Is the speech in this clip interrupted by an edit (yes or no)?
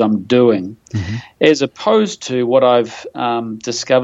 no